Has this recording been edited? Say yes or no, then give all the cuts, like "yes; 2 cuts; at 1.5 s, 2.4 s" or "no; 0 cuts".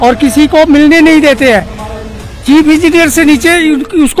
no; 0 cuts